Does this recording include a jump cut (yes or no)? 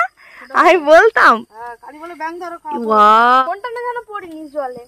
yes